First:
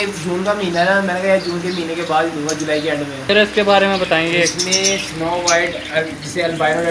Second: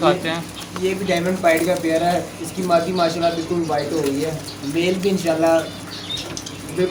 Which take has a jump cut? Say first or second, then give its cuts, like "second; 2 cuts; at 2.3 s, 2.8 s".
first; 1 cut; at 3.3 s